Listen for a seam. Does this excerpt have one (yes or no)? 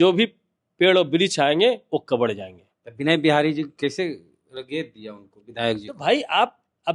no